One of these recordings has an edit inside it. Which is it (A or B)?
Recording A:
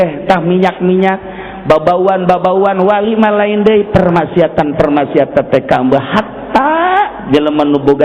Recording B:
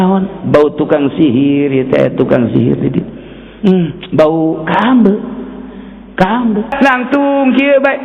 B